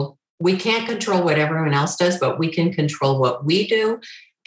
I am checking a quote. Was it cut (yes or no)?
no